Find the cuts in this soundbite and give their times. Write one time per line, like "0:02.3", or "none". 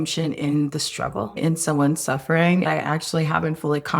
0:01.4
0:02.6